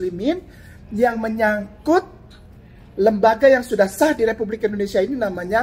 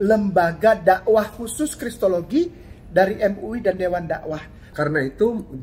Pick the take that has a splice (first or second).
second